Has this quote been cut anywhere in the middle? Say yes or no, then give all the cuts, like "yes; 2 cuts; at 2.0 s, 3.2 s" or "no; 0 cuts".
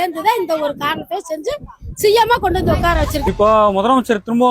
yes; 1 cut; at 3.2 s